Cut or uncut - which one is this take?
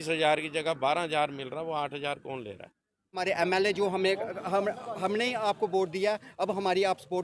cut